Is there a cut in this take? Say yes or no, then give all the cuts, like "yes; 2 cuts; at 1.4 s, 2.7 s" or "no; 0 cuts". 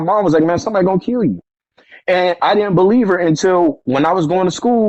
no; 0 cuts